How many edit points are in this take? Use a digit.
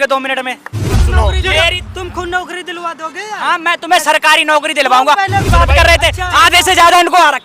2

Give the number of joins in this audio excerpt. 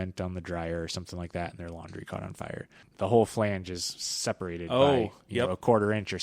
1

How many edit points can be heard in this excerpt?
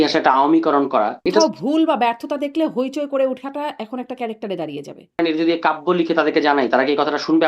2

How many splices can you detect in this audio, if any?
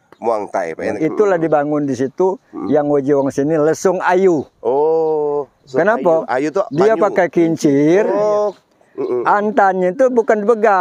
1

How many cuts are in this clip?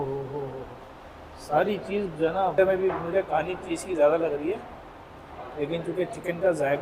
1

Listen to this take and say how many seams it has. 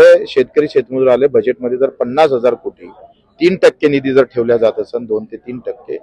0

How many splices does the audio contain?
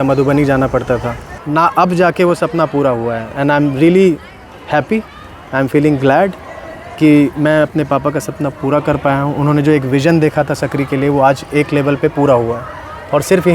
1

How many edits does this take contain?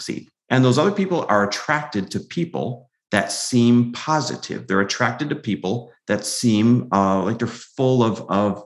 0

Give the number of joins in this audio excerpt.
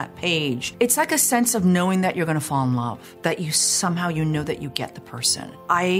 1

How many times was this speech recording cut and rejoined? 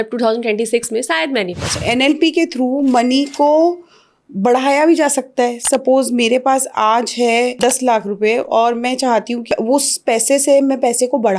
3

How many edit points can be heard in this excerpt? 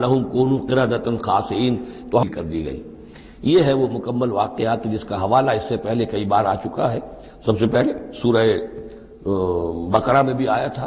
1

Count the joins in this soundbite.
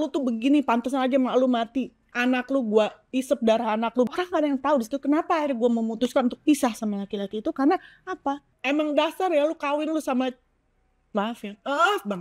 3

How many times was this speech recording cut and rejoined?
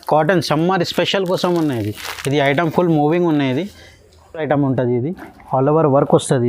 0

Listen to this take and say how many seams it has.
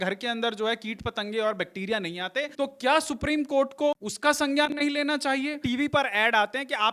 3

